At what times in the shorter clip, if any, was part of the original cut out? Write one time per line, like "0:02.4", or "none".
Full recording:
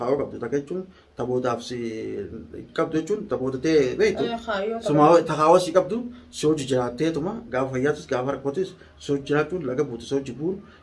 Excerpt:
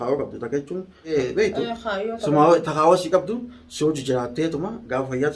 0:01.1